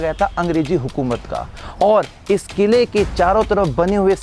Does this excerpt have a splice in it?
yes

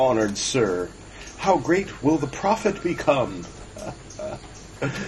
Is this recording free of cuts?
no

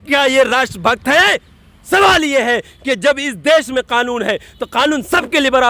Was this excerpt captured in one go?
yes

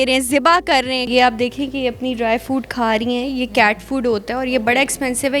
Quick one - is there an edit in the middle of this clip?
yes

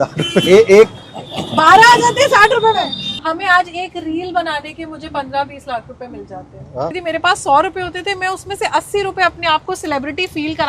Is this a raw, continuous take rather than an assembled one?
no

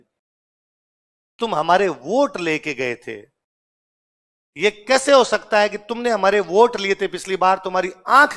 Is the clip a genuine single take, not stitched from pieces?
yes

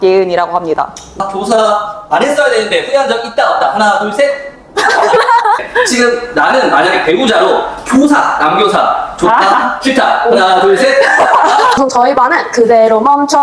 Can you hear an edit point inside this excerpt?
yes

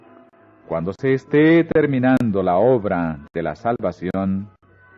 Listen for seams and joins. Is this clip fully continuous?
no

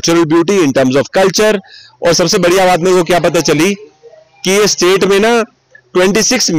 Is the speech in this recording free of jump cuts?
yes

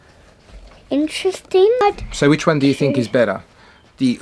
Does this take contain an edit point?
yes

